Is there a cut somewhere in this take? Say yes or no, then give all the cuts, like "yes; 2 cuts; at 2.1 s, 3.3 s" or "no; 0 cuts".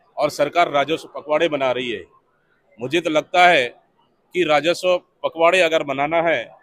no; 0 cuts